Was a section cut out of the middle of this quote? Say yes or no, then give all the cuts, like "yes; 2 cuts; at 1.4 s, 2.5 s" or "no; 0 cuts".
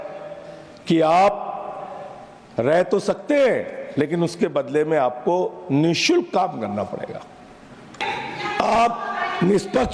yes; 1 cut; at 8.0 s